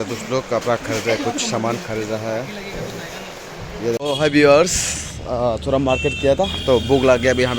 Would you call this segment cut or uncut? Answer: cut